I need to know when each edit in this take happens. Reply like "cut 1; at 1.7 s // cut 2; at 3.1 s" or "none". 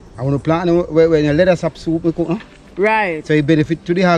none